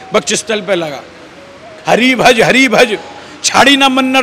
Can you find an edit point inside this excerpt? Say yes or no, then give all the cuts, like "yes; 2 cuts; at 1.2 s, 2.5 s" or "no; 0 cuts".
yes; 1 cut; at 1.8 s